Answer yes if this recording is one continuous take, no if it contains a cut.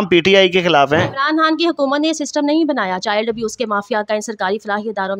yes